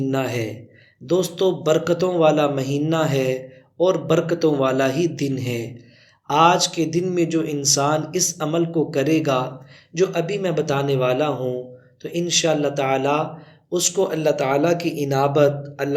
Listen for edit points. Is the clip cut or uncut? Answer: uncut